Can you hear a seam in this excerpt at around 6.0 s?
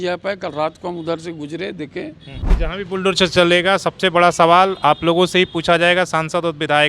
no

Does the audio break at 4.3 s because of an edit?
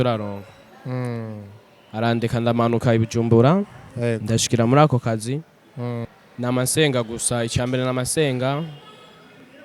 no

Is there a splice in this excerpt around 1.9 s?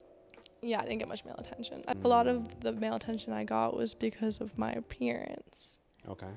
yes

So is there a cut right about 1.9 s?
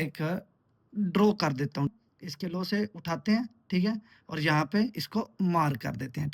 yes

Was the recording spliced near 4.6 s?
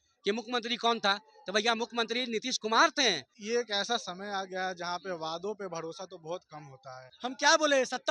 no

